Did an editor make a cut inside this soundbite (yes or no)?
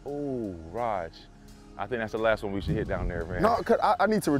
no